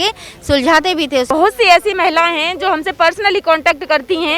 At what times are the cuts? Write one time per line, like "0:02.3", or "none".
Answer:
0:01.3